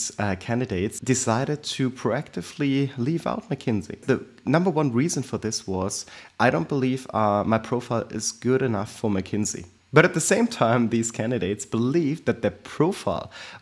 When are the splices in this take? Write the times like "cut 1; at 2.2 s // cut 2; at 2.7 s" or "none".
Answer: cut 1; at 1.0 s // cut 2; at 4.0 s // cut 3; at 9.7 s

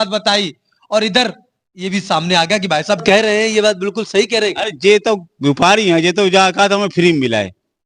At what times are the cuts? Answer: cut 1; at 3.0 s

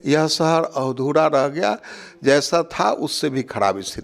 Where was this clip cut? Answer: none

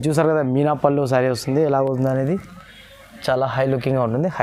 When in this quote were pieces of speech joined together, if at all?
none

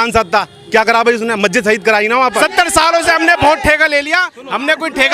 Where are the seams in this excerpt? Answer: cut 1; at 2.4 s

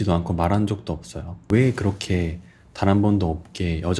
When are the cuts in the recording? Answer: cut 1; at 1.5 s

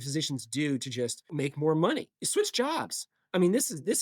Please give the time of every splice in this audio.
cut 1; at 1.3 s // cut 2; at 2.2 s

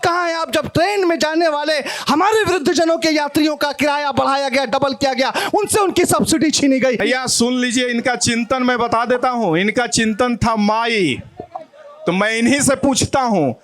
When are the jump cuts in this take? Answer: cut 1; at 7.0 s

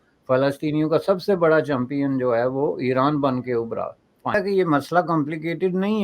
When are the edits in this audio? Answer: cut 1; at 4.3 s

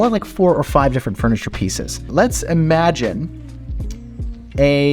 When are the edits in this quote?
cut 1; at 2.1 s

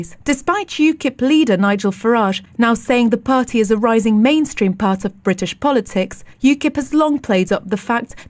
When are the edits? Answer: cut 1; at 1.3 s

